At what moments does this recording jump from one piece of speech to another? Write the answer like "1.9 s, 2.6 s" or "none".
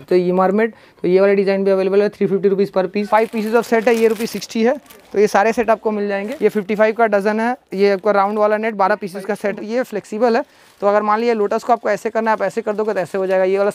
3.0 s, 6.3 s, 9.6 s